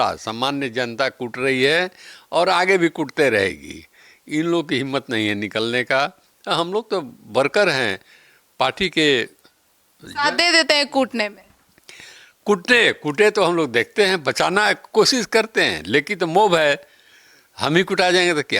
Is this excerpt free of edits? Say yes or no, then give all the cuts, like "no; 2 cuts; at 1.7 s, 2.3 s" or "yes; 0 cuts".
yes; 0 cuts